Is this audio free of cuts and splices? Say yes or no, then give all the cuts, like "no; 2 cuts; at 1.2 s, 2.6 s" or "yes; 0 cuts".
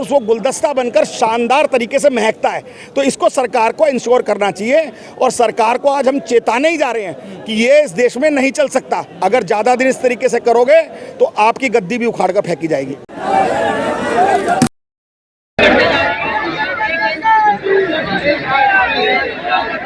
no; 1 cut; at 13.0 s